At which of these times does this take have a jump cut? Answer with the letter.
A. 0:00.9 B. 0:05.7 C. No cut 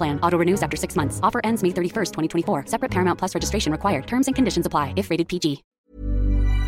B